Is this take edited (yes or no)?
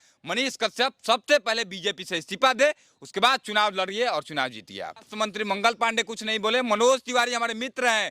yes